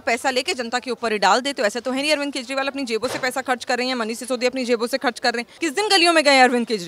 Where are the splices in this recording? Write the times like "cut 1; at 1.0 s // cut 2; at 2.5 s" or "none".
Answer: cut 1; at 5.5 s